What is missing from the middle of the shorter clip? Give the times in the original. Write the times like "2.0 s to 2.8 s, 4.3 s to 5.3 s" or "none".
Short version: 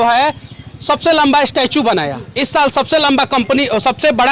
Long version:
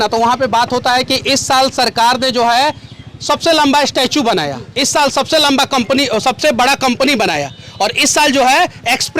none